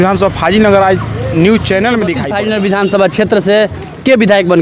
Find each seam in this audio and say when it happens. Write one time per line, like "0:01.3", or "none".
0:02.3